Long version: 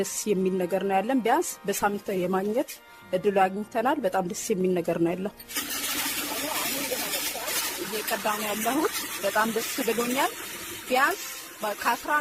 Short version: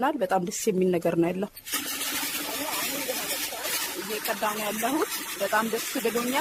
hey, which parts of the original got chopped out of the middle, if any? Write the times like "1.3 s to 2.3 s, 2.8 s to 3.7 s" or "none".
none